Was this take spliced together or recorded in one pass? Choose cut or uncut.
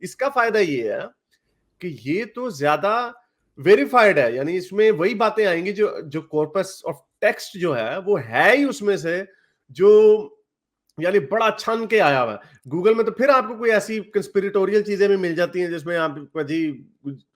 uncut